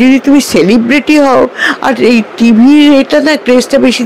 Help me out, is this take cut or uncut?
uncut